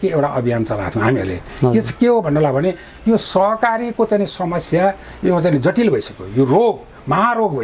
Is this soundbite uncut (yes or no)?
no